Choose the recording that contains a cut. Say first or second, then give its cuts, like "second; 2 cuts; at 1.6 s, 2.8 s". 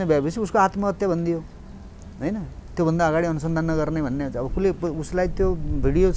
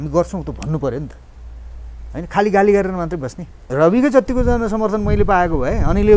second; 1 cut; at 3.6 s